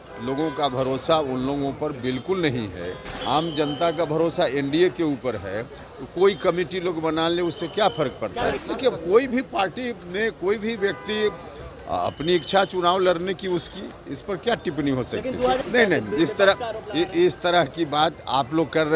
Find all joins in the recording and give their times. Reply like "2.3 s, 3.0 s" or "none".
3.1 s, 8.6 s, 15.6 s